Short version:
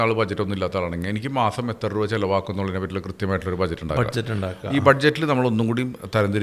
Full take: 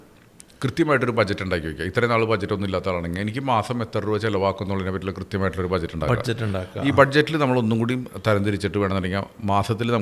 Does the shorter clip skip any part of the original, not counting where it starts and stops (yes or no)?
no